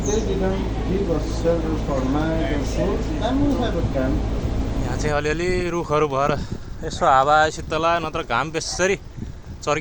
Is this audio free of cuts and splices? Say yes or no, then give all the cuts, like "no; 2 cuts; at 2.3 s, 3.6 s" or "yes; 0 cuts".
no; 1 cut; at 4.9 s